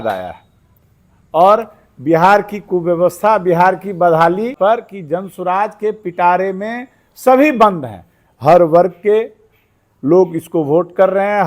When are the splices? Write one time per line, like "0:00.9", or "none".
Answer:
0:04.5

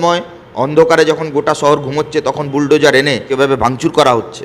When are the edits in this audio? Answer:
0:03.3

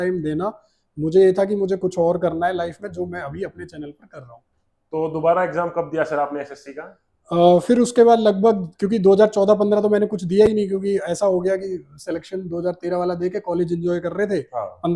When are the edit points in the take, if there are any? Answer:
none

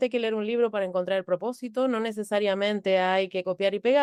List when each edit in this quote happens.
none

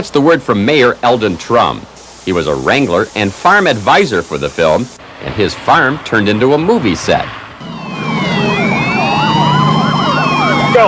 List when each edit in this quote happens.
0:04.1

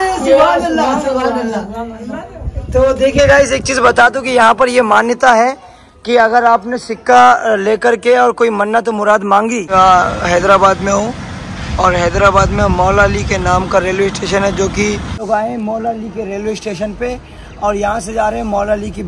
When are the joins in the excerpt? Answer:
0:09.6
0:15.2

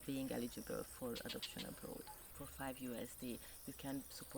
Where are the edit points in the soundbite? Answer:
0:02.2

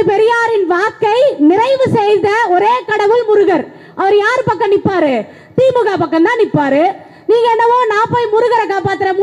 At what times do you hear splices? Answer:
none

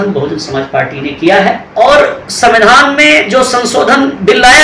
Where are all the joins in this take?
0:01.6

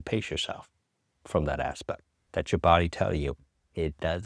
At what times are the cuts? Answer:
none

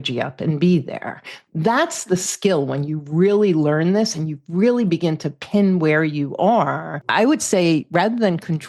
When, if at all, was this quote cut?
0:07.0

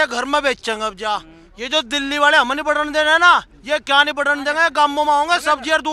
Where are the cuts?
none

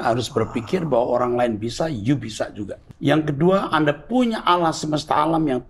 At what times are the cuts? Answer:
0:02.8

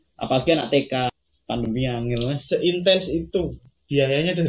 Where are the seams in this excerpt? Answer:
0:01.1

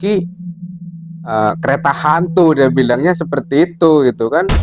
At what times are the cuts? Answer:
none

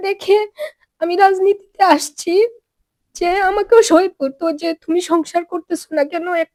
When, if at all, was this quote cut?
none

